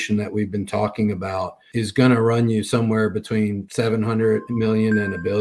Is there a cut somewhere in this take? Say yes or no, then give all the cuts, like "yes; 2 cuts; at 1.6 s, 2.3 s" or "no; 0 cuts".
yes; 3 cuts; at 1.6 s, 3.6 s, 4.5 s